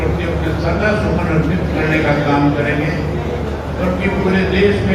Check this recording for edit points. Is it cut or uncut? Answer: uncut